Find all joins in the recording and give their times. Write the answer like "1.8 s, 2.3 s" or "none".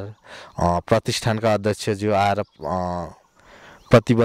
none